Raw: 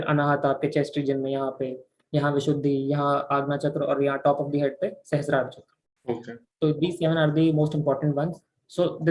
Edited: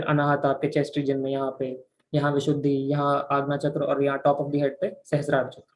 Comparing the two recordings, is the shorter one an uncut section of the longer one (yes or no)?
yes